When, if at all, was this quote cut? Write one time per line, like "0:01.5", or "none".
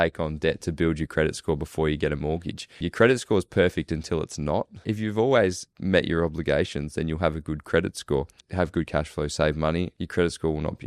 0:02.8
0:04.8
0:05.7
0:08.4
0:10.0